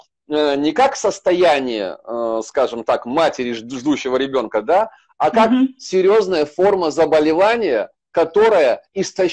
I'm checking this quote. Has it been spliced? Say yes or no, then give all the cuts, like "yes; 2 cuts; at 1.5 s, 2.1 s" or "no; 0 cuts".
no; 0 cuts